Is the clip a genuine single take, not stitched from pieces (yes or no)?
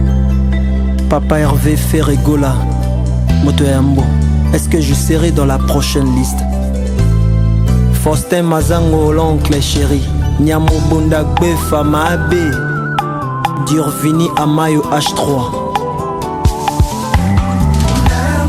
yes